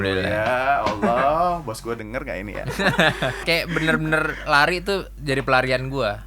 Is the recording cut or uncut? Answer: cut